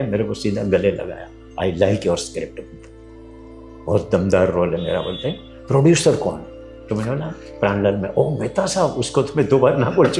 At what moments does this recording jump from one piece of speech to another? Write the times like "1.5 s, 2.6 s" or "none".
none